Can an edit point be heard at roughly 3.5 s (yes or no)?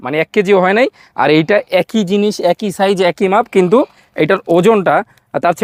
no